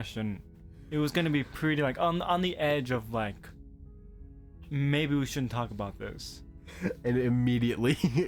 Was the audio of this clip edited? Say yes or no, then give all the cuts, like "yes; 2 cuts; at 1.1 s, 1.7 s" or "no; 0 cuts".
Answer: no; 0 cuts